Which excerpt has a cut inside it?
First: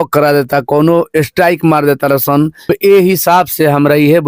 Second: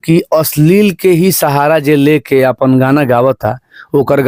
first; 1 cut; at 2.7 s

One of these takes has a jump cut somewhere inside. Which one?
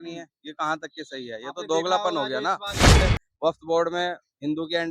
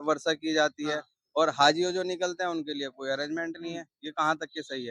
first; 1 cut; at 2.9 s

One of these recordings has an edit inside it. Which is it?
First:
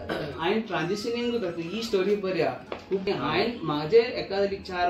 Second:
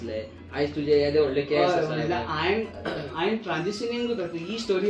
first; 1 cut; at 3.1 s

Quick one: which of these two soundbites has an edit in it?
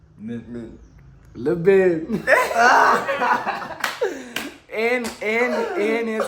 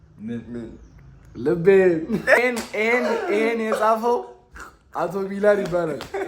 second; 1 cut; at 2.4 s

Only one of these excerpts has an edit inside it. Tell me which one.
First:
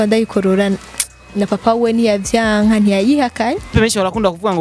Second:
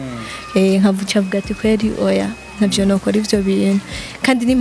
first; 1 cut; at 3.7 s

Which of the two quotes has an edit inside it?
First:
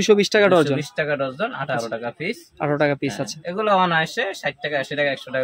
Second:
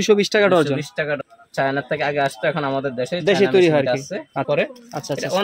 second; 2 cuts; at 1.2 s, 4.5 s

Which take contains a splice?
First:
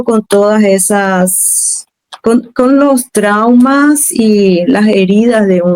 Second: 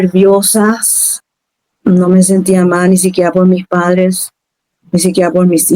second; 1 cut; at 1.1 s

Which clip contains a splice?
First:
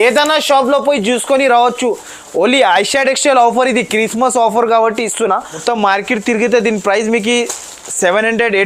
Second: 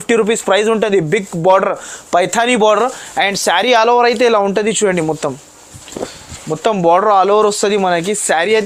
first; 1 cut; at 5.5 s

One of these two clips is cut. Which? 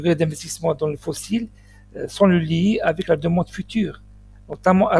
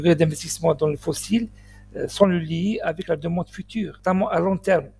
second; 1 cut; at 3.9 s

